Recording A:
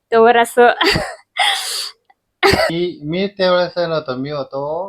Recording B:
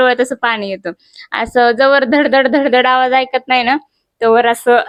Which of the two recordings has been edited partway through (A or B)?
A